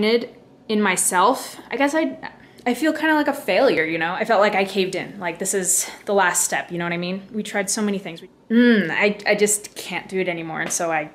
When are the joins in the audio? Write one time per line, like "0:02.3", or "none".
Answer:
0:01.5
0:03.8
0:08.1